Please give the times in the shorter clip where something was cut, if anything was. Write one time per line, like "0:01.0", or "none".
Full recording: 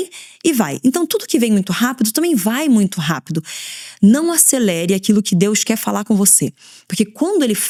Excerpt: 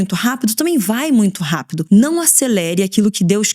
0:01.7